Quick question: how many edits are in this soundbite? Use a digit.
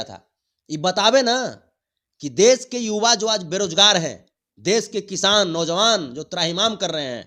0